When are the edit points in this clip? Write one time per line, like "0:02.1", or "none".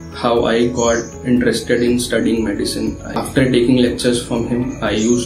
0:03.1